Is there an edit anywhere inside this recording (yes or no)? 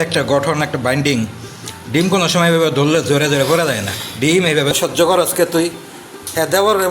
yes